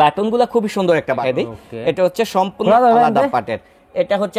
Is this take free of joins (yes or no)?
no